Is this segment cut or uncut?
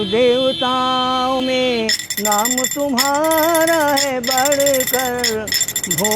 cut